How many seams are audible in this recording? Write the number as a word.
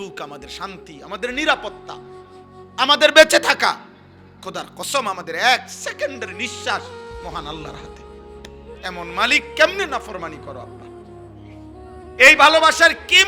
four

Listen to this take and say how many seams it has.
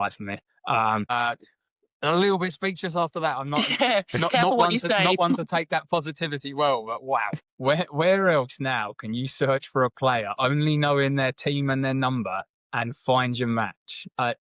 two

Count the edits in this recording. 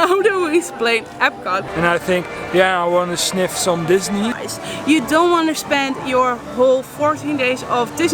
two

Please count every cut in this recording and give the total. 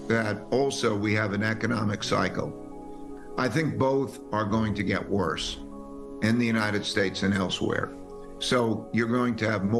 zero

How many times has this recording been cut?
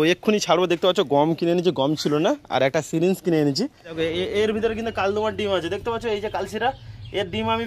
one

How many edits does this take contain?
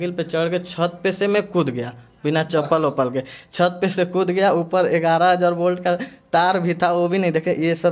zero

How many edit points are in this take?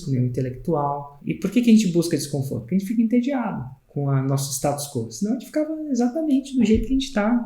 one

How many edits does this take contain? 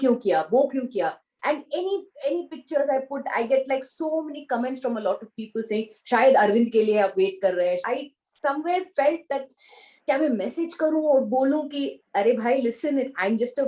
one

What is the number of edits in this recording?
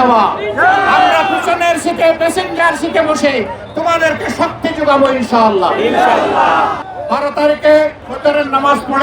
two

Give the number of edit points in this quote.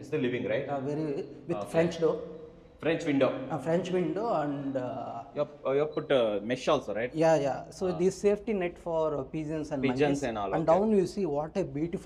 zero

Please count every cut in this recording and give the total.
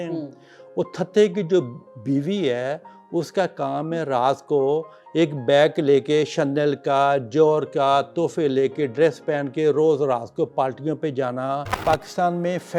one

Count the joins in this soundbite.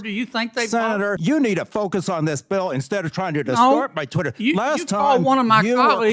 one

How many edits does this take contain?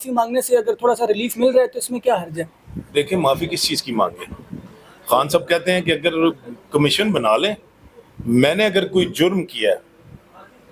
zero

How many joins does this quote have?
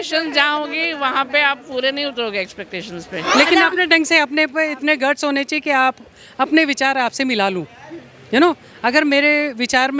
one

